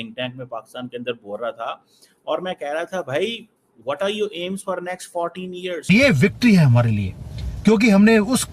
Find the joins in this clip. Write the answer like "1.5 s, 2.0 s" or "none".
5.9 s